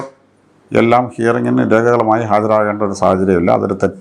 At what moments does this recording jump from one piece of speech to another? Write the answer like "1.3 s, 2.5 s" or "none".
none